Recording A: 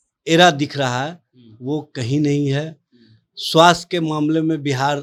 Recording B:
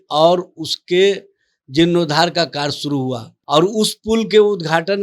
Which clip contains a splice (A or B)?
B